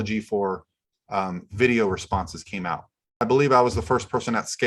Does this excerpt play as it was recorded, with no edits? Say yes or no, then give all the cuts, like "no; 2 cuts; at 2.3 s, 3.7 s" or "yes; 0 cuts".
no; 1 cut; at 3.2 s